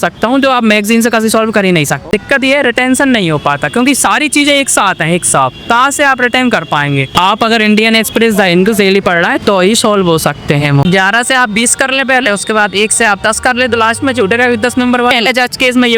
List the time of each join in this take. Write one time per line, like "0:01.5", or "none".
0:02.0
0:07.1
0:10.8
0:15.1